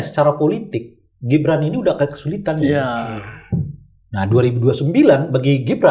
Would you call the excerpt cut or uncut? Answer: uncut